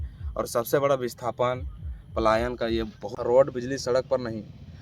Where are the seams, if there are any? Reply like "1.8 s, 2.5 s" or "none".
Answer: 3.0 s